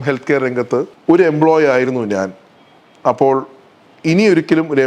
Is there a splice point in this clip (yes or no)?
yes